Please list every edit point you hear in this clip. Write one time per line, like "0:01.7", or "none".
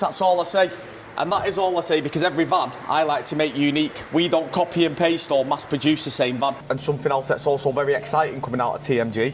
0:06.6